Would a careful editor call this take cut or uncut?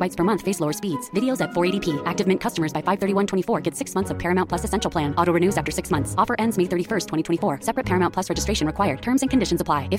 uncut